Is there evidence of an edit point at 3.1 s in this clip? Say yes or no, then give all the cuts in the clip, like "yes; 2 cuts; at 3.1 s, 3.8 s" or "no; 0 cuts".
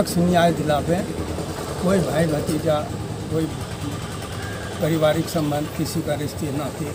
no; 0 cuts